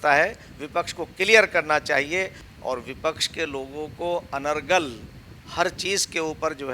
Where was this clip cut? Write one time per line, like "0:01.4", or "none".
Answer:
0:02.4